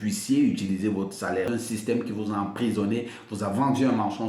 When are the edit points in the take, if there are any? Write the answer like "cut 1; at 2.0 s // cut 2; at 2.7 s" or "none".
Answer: cut 1; at 1.5 s